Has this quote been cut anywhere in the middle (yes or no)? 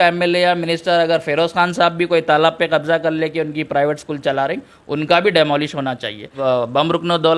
yes